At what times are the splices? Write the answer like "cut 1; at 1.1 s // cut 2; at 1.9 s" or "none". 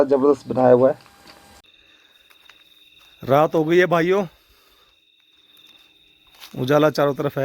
cut 1; at 1.6 s